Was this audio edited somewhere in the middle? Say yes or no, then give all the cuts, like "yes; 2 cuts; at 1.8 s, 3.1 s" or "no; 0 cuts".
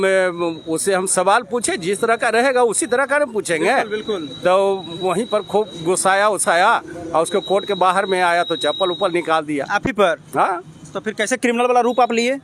no; 0 cuts